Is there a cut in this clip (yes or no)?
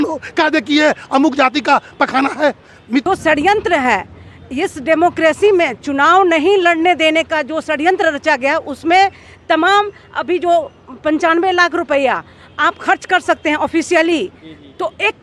yes